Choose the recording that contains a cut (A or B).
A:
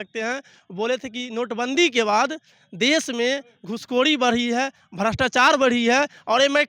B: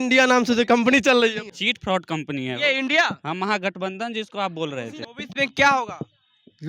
B